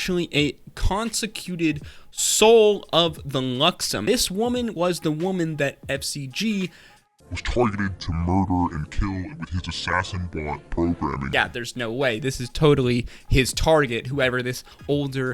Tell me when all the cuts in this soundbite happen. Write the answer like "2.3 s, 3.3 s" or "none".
4.0 s, 11.2 s